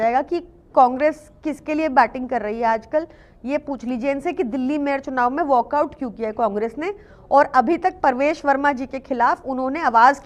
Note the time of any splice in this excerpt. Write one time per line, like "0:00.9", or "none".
none